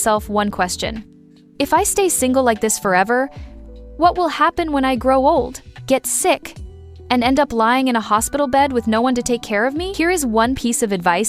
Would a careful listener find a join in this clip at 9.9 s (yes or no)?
yes